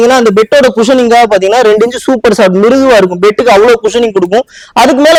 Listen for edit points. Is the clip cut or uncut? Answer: uncut